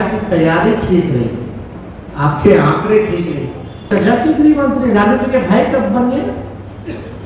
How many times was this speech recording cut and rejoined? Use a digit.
1